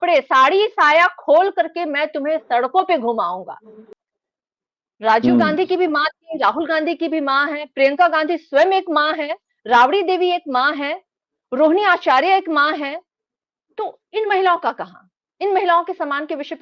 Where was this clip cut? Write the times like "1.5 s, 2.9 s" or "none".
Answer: 3.9 s

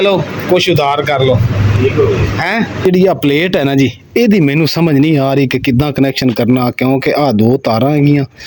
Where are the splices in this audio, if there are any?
2.9 s

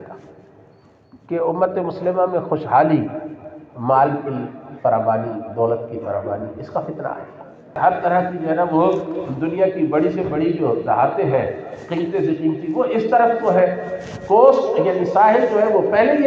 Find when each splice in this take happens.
7.7 s

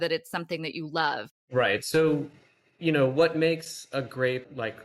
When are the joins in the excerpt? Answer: 1.3 s

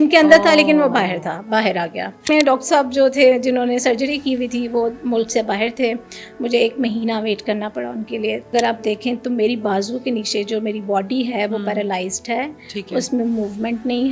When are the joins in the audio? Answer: 2.3 s, 8.5 s

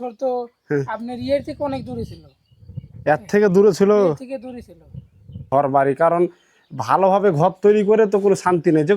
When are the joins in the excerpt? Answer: 5.4 s

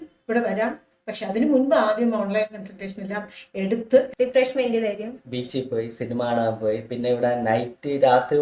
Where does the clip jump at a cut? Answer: 4.1 s

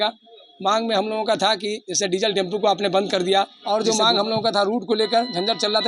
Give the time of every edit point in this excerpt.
3.6 s

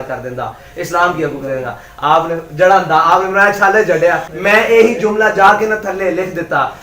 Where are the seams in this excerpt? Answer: 4.3 s

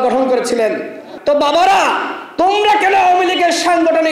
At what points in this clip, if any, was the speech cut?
1.1 s

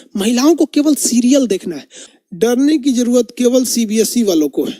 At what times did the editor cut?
2.2 s

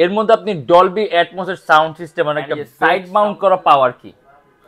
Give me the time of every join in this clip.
2.7 s

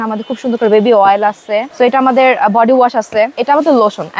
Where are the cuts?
1.7 s, 3.4 s

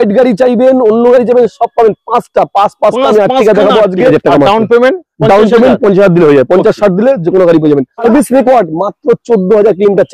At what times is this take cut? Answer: 4.1 s, 8.0 s

